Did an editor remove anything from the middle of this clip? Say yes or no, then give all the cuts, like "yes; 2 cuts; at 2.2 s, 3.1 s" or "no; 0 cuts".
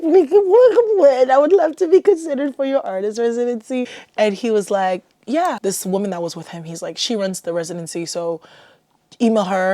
yes; 2 cuts; at 4.0 s, 5.6 s